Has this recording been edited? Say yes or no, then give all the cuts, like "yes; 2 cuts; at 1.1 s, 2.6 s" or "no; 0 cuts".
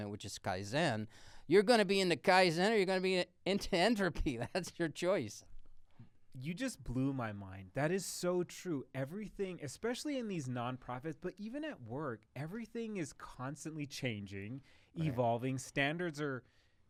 no; 0 cuts